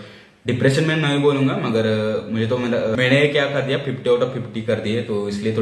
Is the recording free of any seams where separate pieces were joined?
no; 1 cut; at 3.0 s

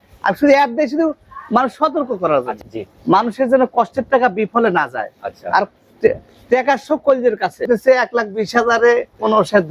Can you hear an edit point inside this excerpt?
yes; 2 cuts; at 2.6 s, 7.7 s

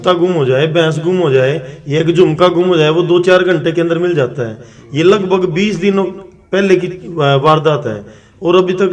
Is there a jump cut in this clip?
no; 0 cuts

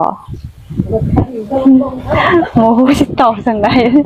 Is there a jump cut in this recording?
no; 0 cuts

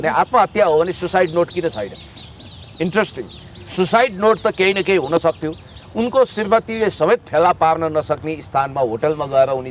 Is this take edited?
no; 0 cuts

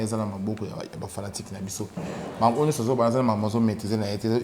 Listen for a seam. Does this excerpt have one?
no; 0 cuts

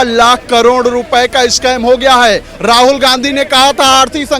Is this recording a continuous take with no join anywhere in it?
yes; 0 cuts

